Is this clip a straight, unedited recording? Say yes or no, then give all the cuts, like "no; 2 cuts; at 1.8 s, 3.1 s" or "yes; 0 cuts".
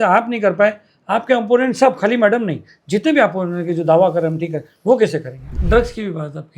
no; 1 cut; at 5.4 s